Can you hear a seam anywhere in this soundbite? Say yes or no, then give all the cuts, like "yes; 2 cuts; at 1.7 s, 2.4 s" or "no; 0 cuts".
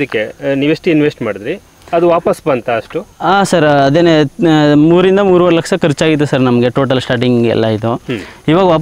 no; 0 cuts